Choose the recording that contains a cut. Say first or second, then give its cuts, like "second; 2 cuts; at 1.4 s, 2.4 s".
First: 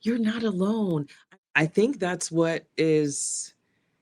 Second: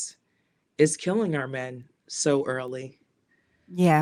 first; 1 cut; at 1.1 s